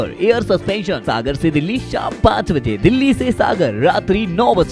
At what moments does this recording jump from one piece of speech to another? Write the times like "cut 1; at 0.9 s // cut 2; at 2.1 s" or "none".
cut 1; at 1.0 s